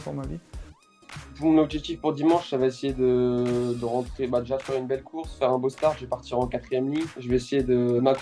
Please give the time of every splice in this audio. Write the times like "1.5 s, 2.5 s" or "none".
0.9 s, 7.1 s